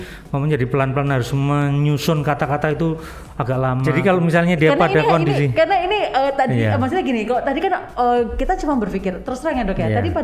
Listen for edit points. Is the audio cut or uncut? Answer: cut